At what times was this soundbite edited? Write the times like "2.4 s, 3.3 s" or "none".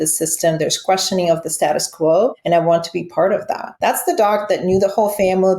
2.4 s, 3.6 s